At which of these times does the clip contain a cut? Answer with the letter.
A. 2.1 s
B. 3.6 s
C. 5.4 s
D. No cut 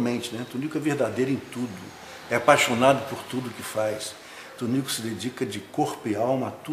B